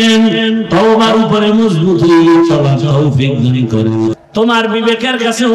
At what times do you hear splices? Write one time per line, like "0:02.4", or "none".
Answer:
0:04.2